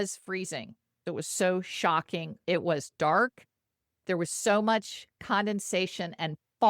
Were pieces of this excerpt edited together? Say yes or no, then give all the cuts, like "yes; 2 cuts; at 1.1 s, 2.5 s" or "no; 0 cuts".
yes; 2 cuts; at 0.9 s, 2.3 s